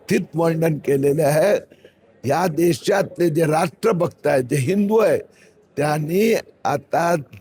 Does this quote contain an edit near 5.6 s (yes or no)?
no